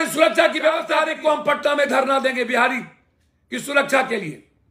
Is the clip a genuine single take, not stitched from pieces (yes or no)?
no